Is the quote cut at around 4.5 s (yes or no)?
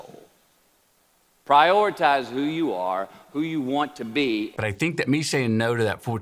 yes